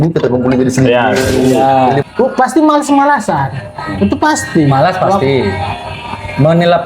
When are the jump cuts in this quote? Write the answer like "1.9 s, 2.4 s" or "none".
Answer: 2.0 s